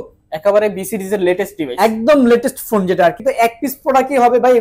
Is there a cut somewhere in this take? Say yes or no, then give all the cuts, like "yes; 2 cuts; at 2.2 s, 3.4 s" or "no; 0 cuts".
yes; 1 cut; at 3.2 s